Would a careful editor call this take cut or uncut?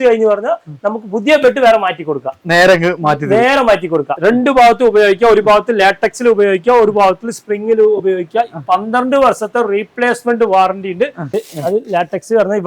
cut